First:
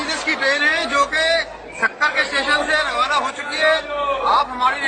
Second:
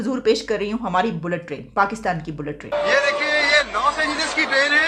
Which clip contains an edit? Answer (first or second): second